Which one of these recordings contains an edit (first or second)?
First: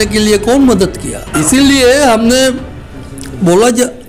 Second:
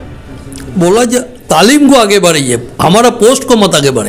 first